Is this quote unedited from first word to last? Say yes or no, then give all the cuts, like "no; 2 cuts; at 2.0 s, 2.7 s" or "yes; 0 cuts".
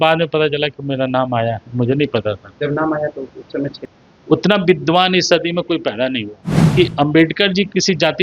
no; 2 cuts; at 3.8 s, 6.7 s